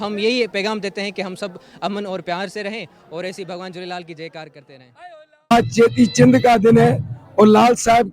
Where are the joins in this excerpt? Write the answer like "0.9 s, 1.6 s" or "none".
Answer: 5.5 s